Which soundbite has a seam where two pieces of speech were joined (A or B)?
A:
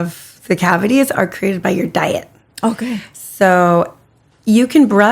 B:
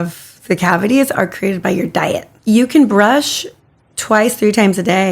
B